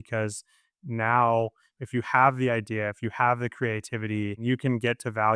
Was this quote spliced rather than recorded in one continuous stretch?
yes; 1 cut; at 4.4 s

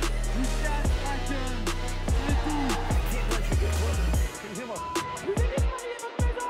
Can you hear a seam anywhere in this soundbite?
no; 0 cuts

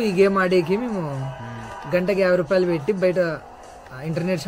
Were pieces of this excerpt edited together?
no; 0 cuts

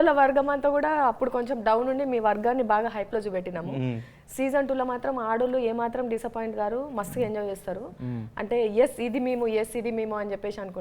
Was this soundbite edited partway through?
no; 0 cuts

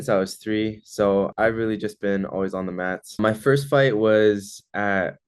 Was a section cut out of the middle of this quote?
yes; 2 cuts; at 1.3 s, 3.2 s

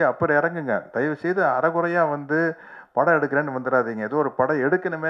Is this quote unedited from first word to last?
yes; 0 cuts

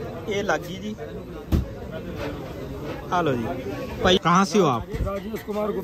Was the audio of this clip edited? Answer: yes; 1 cut; at 4.2 s

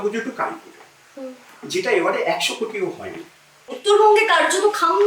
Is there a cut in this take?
yes; 1 cut; at 3.8 s

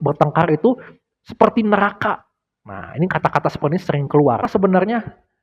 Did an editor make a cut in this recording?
yes; 1 cut; at 4.5 s

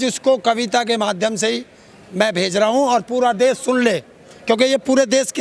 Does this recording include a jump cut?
no; 0 cuts

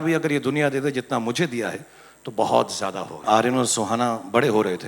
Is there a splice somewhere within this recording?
yes; 1 cut; at 3.2 s

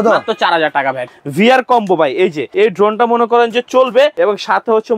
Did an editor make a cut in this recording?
yes; 3 cuts; at 1.1 s, 2.4 s, 4.1 s

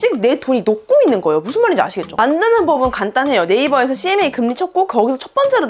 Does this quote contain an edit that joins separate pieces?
yes; 1 cut; at 2.0 s

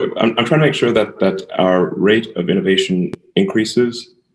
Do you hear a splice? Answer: no; 0 cuts

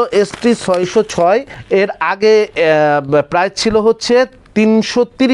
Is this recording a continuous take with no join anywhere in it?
no; 1 cut; at 1.5 s

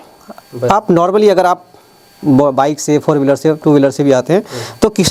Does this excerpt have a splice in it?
no; 0 cuts

